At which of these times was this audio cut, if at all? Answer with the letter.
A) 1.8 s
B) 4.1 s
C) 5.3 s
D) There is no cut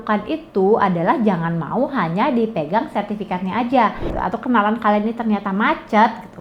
B